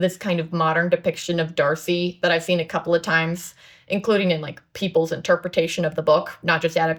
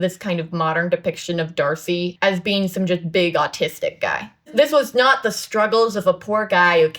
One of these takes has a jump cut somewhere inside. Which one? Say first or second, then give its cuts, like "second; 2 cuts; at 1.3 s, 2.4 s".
second; 2 cuts; at 2.1 s, 4.5 s